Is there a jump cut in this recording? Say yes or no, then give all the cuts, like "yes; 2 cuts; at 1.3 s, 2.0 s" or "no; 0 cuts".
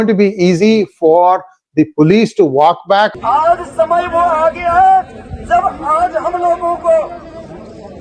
yes; 1 cut; at 3.2 s